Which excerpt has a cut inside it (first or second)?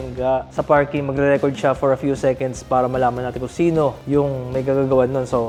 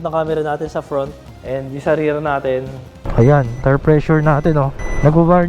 second